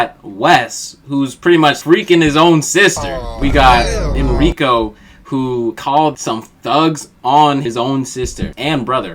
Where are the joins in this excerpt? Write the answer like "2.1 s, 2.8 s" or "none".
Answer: none